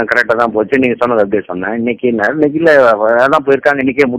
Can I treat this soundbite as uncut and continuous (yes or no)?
yes